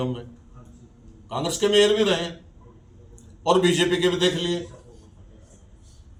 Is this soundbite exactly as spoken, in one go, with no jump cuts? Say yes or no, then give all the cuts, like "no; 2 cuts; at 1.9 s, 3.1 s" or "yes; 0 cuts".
yes; 0 cuts